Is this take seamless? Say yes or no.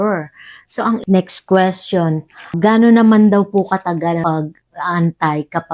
no